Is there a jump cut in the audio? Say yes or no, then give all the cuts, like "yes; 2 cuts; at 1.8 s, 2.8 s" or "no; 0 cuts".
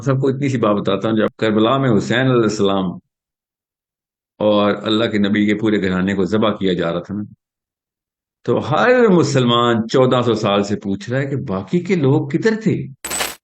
yes; 1 cut; at 1.3 s